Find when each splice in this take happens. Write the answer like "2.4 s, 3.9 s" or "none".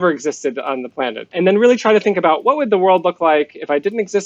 1.3 s